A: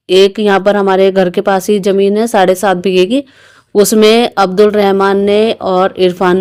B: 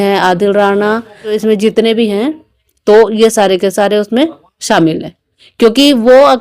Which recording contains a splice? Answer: B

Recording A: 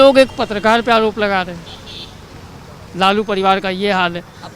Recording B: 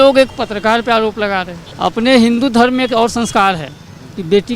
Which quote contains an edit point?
B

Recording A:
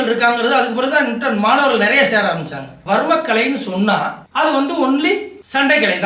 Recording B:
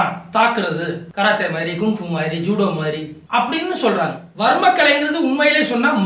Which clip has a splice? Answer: A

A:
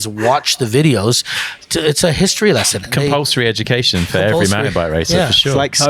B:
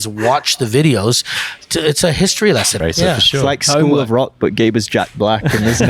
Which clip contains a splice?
B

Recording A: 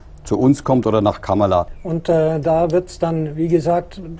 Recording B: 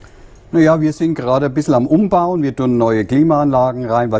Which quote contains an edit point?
A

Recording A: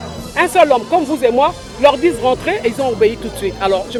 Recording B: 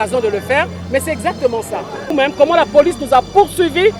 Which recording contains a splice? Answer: B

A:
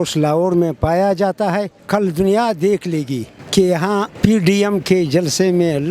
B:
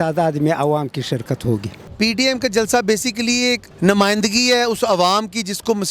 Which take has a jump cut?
B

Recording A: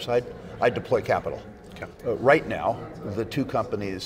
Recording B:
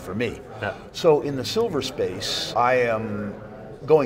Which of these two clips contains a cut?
B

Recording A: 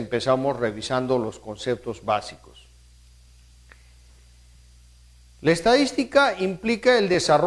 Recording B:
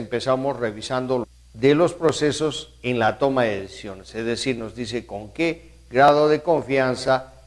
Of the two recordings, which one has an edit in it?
A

